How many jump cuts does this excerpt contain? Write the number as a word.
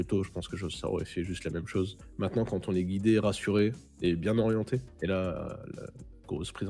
two